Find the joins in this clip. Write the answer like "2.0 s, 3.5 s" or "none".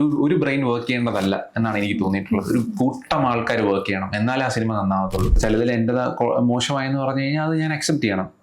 5.4 s

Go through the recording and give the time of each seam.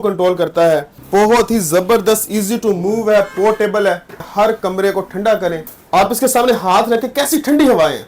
1.0 s, 4.2 s, 5.7 s

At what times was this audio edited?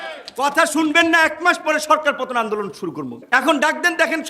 3.2 s

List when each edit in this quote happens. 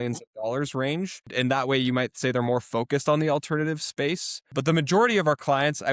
1.3 s, 4.5 s

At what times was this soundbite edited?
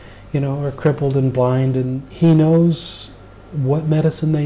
2.0 s

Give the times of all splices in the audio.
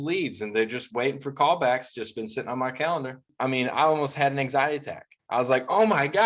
3.2 s

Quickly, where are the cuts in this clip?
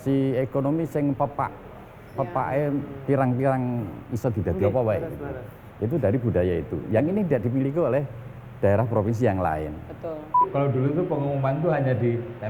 10.4 s

